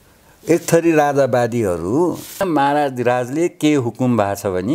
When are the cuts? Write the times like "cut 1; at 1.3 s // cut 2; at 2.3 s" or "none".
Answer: cut 1; at 2.4 s